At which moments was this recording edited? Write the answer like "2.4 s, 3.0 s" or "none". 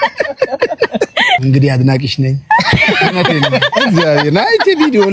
1.4 s